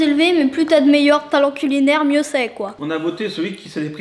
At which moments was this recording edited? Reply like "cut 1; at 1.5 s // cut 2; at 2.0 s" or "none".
cut 1; at 2.8 s

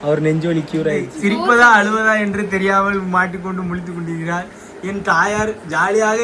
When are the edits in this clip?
cut 1; at 1.1 s

